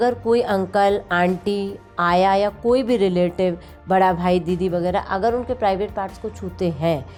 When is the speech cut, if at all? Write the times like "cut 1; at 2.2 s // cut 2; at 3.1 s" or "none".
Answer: none